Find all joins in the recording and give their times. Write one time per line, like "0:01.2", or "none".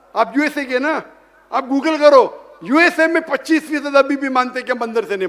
none